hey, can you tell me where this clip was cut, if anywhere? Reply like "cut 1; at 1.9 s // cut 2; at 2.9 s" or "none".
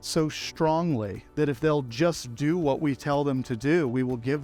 none